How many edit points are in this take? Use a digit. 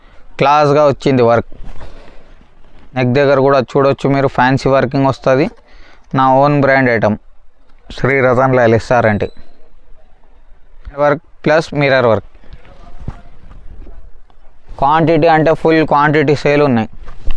2